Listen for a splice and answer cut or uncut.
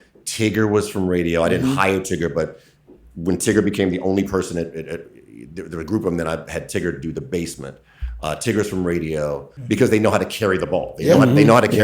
cut